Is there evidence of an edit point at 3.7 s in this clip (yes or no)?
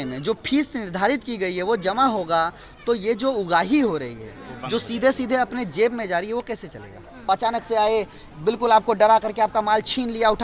no